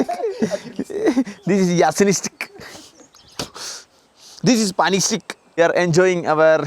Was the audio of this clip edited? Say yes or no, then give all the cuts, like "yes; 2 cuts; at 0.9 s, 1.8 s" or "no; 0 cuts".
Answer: yes; 1 cut; at 5.6 s